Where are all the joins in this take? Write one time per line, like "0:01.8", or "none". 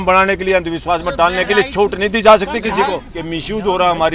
0:03.1